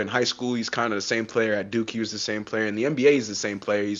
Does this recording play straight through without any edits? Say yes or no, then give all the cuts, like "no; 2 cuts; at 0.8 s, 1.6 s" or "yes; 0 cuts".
yes; 0 cuts